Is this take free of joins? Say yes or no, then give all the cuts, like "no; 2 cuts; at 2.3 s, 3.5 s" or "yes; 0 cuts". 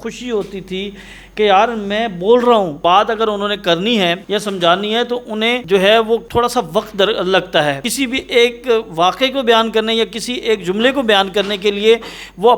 no; 5 cuts; at 2.8 s, 4.2 s, 5.6 s, 6.3 s, 7.9 s